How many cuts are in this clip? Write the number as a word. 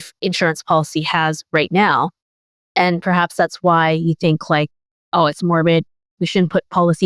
zero